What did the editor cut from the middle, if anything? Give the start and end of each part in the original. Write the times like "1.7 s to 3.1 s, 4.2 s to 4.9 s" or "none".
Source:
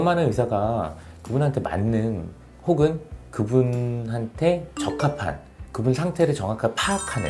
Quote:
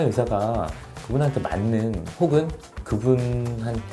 2.3 s to 2.5 s